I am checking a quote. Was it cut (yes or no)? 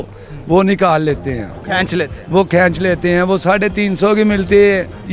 no